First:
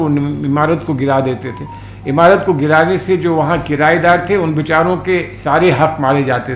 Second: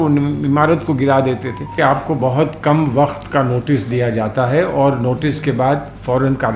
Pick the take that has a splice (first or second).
second